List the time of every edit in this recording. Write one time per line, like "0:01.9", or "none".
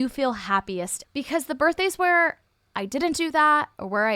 0:01.0